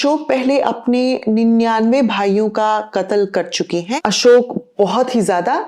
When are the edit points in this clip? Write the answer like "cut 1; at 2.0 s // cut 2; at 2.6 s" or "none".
cut 1; at 3.9 s